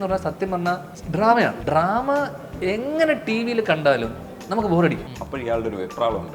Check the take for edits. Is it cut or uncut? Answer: cut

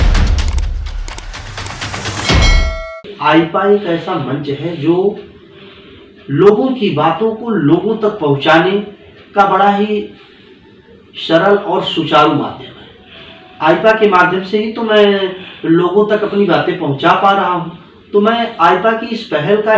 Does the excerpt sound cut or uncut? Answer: cut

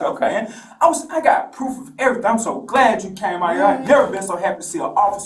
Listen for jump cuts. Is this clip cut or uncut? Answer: uncut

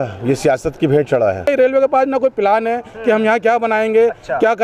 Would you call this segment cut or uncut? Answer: cut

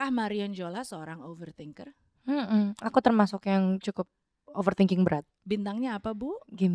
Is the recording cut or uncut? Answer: uncut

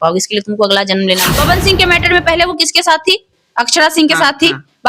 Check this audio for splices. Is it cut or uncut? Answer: cut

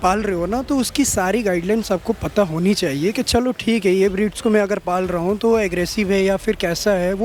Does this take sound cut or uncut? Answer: uncut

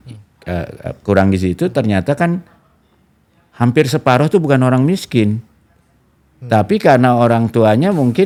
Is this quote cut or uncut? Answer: uncut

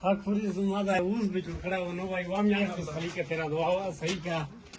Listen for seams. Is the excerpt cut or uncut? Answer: cut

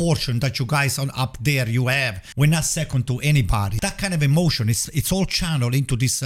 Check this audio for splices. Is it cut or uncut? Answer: cut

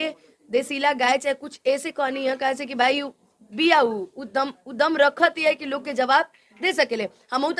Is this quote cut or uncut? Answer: uncut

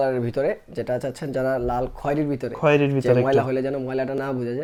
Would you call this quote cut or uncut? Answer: uncut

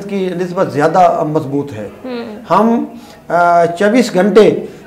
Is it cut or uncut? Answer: uncut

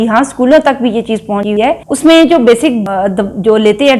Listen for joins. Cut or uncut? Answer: cut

